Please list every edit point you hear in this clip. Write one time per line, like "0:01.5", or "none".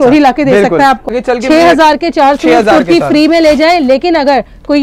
0:01.1